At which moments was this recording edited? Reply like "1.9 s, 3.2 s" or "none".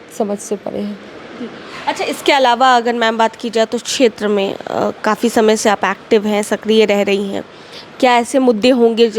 none

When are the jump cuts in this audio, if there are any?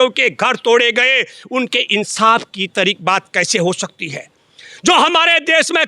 none

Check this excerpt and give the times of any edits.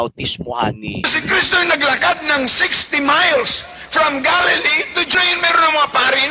1.1 s, 5.1 s

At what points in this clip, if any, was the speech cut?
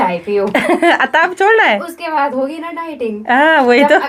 none

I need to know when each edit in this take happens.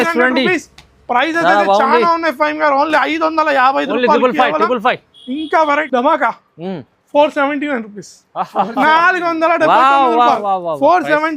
5.9 s

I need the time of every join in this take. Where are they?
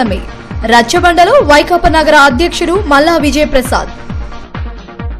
none

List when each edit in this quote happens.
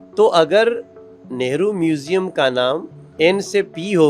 3.0 s

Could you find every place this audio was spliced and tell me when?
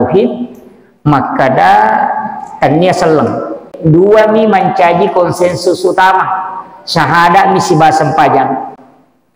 3.7 s

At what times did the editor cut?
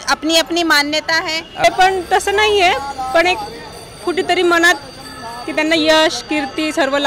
1.6 s

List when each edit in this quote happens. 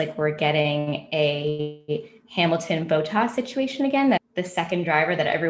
4.2 s

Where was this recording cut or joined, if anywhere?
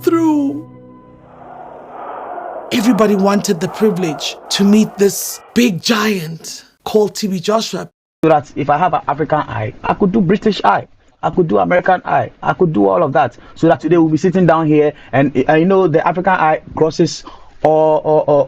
8.2 s

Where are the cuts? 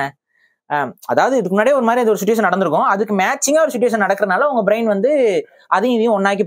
none

